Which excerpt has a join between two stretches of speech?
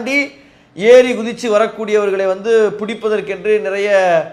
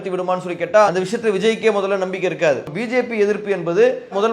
second; 1 cut; at 2.6 s

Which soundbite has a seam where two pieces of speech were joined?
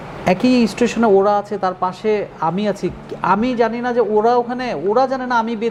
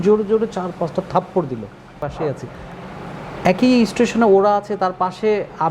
second; 1 cut; at 2.0 s

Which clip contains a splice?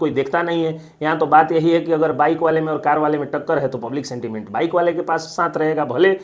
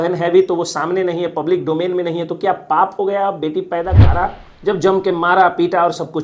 second; 1 cut; at 4.0 s

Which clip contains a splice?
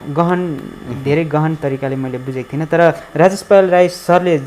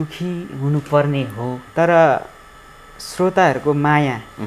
second; 1 cut; at 1.5 s

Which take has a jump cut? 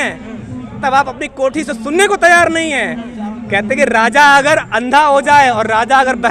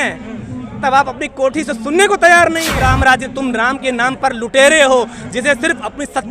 second; 1 cut; at 2.7 s

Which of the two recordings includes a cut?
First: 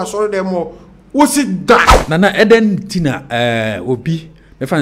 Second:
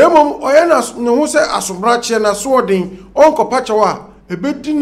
first; 1 cut; at 2.0 s

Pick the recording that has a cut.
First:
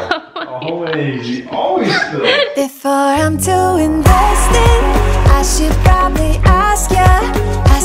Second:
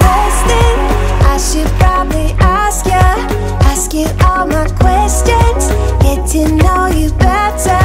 first; 1 cut; at 2.5 s

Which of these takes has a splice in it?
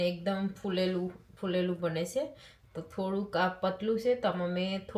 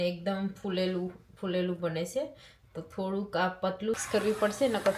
second; 1 cut; at 4.0 s

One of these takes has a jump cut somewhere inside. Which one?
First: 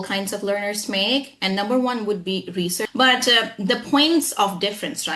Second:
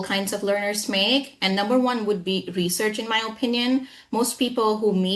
first; 1 cut; at 2.8 s

